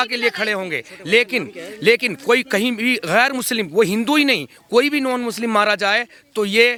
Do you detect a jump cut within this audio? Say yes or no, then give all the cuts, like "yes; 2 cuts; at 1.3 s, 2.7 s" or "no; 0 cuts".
no; 0 cuts